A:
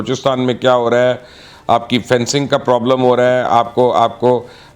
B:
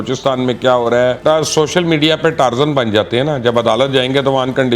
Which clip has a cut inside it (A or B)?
B